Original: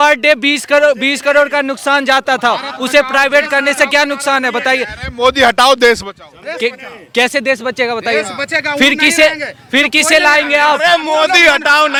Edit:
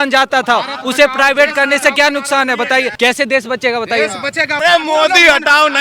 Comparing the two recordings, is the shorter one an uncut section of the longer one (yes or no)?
no